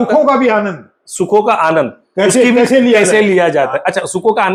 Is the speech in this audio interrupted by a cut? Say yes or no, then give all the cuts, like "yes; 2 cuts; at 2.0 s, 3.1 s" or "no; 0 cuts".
no; 0 cuts